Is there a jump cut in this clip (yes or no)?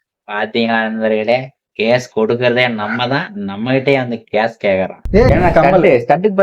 yes